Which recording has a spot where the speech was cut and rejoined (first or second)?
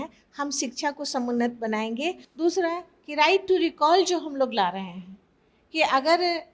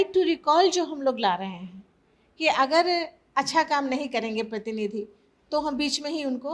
first